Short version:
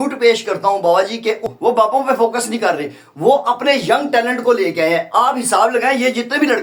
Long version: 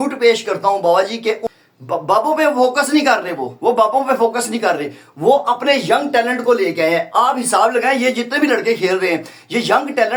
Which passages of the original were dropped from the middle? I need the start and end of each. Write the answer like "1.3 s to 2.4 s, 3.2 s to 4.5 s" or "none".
1.5 s to 3.5 s